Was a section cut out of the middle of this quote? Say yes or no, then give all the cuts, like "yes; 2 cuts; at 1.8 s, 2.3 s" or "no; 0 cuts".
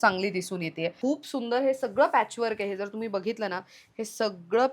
yes; 1 cut; at 1.0 s